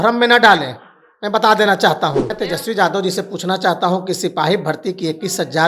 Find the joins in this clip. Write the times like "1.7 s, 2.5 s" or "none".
2.3 s